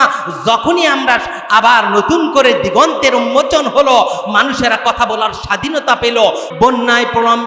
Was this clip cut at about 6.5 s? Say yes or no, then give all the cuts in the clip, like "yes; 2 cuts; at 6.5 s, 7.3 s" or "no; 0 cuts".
yes; 1 cut; at 6.5 s